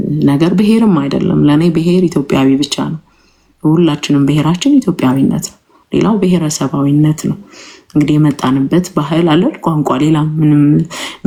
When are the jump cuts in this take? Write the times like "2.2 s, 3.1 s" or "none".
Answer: none

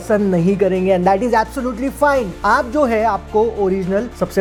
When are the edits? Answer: none

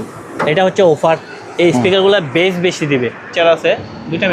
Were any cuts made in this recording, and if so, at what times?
3.3 s

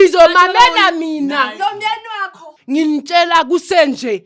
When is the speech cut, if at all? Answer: 2.5 s

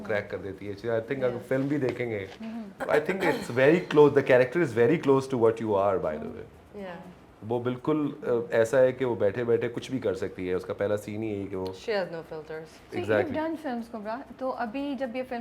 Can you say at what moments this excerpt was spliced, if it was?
none

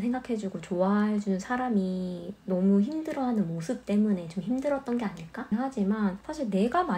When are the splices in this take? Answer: 5.5 s

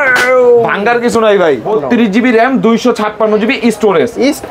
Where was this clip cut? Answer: 1.6 s

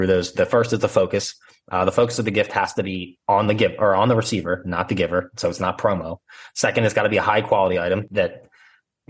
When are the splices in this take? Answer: 8.0 s

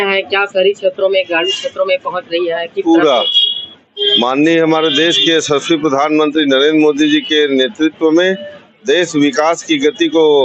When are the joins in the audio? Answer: none

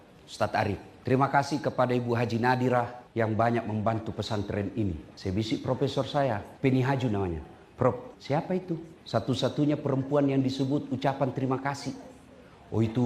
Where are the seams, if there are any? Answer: 0.9 s, 3.0 s, 5.1 s, 6.5 s, 8.1 s, 8.9 s

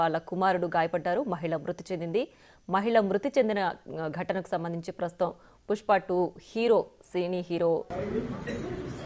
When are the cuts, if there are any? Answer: 7.9 s

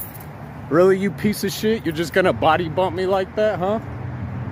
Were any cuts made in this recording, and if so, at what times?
none

